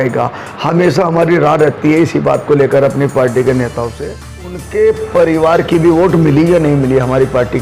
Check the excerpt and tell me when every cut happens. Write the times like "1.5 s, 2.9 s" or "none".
4.6 s